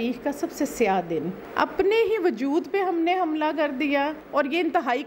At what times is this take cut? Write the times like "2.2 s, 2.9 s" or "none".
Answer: 1.4 s, 4.2 s